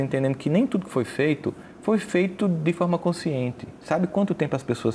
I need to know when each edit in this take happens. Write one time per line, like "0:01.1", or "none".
none